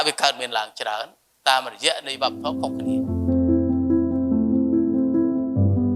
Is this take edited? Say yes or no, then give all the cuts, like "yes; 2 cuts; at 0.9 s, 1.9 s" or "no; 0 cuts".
yes; 1 cut; at 2.4 s